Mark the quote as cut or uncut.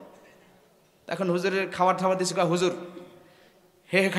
uncut